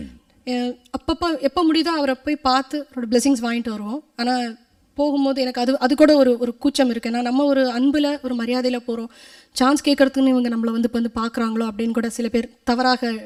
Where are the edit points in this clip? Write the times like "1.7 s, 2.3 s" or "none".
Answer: none